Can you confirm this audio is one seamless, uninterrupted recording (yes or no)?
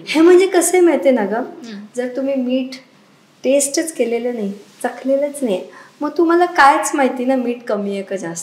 yes